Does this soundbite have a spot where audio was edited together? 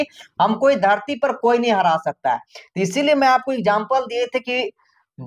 no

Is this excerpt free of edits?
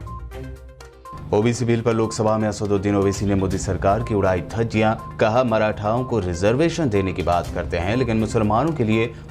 yes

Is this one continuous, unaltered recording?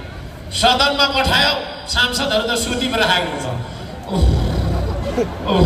yes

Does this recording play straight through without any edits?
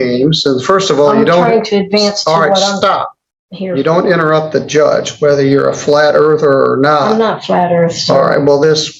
yes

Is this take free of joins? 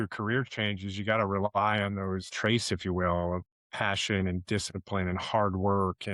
no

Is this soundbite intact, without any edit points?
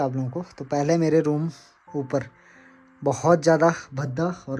yes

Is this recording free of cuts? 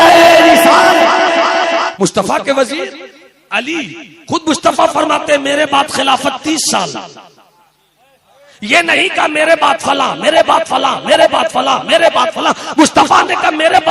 no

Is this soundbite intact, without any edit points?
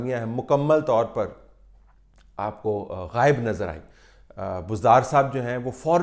yes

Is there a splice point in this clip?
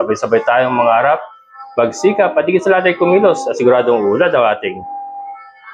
no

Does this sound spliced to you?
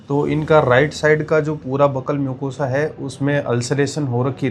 no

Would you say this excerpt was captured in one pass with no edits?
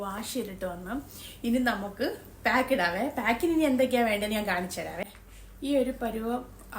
no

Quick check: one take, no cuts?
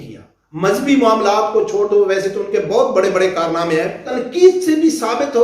no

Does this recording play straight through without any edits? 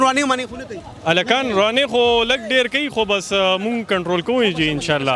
yes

